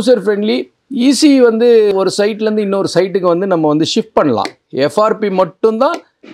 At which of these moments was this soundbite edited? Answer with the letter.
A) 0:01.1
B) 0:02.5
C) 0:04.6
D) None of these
C